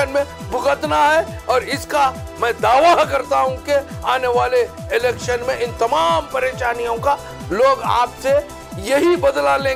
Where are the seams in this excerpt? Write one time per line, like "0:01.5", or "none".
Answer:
none